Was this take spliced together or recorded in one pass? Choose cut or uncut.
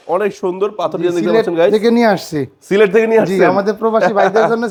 uncut